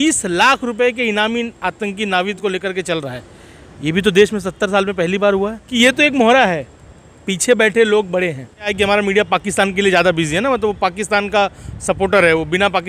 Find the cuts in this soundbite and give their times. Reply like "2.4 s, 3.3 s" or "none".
5.6 s, 8.7 s